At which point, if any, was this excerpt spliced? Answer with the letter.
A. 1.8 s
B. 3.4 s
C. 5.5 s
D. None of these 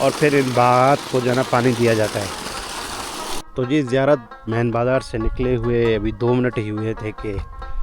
B